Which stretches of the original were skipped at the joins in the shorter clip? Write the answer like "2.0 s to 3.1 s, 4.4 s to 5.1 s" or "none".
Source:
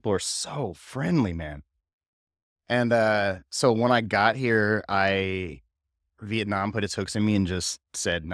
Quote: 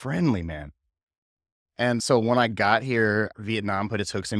2.9 s to 3.5 s, 4.8 s to 6.1 s